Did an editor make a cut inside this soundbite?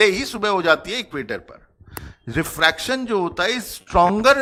no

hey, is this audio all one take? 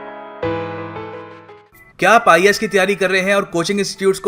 no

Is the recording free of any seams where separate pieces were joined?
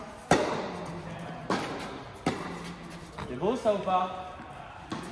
no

